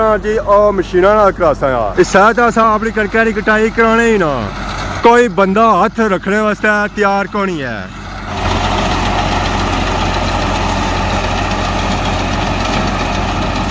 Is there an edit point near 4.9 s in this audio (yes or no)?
yes